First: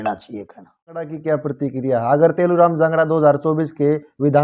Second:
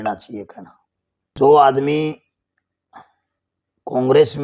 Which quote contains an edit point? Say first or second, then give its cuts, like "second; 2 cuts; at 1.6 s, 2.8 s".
first; 1 cut; at 1.1 s